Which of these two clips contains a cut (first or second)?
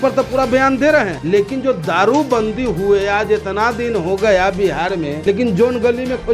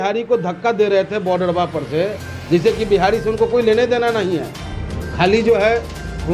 first